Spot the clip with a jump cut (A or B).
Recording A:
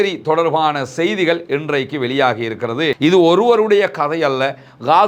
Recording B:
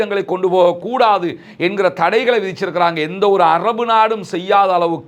A